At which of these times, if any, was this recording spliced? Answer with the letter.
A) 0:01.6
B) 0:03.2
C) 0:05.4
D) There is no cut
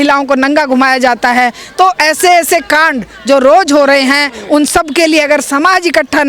D